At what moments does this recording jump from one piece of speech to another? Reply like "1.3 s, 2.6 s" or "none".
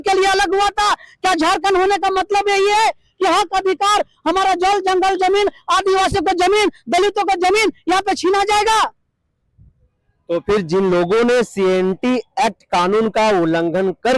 none